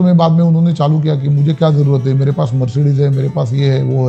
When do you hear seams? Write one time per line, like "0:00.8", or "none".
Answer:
none